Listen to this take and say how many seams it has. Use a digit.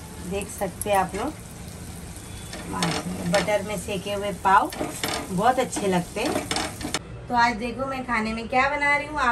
1